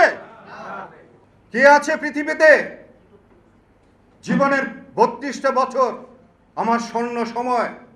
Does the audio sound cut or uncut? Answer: cut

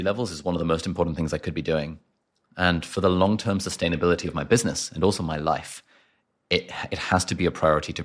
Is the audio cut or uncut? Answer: uncut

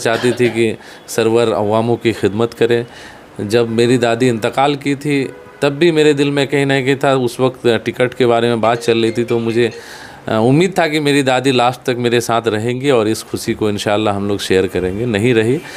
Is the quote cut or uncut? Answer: uncut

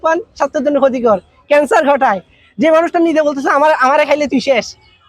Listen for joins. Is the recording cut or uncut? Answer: uncut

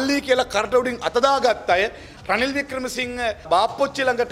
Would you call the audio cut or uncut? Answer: cut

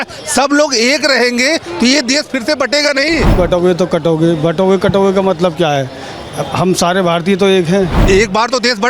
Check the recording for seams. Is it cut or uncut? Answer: cut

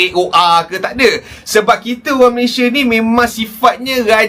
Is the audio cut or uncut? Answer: uncut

